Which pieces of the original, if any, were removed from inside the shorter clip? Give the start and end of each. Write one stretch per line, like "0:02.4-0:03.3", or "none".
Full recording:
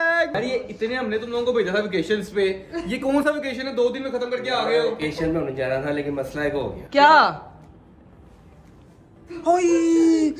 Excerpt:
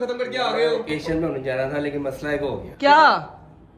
none